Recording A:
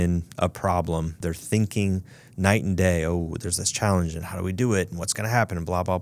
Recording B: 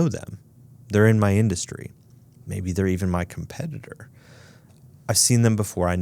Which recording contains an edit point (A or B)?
A